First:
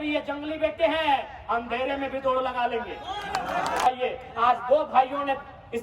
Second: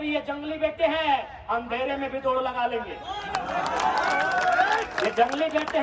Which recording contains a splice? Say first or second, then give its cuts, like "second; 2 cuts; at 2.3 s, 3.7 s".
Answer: first; 1 cut; at 3.9 s